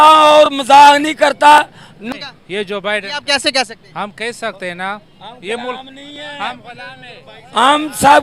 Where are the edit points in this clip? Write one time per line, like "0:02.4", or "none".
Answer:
0:02.1